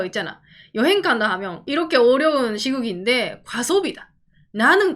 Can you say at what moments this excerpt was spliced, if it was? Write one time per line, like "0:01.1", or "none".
0:01.6